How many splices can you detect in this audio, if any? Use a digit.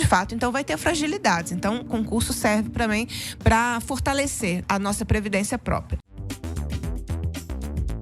2